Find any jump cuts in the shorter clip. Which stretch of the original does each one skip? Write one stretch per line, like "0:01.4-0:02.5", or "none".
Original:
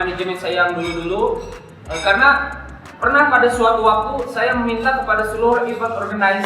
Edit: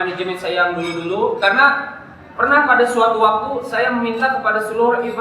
0:01.4-0:02.0